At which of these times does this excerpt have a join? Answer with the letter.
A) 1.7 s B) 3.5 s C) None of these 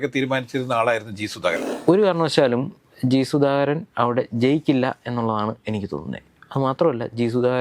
A